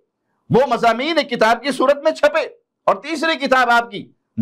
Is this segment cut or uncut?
uncut